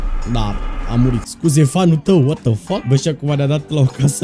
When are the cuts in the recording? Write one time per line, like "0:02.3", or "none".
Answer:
0:02.8